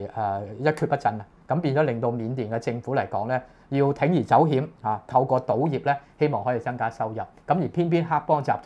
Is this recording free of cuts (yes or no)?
yes